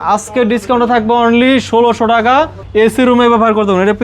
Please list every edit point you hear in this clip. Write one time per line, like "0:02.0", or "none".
0:02.6

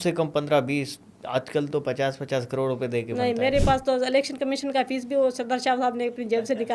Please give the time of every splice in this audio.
none

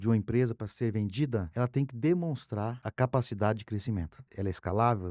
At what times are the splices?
0:01.5
0:02.8
0:04.2

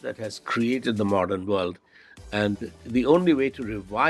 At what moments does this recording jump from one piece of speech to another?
0:02.7

